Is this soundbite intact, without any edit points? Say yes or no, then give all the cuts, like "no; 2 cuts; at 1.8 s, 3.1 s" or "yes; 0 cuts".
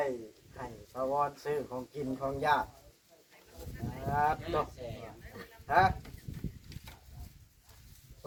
yes; 0 cuts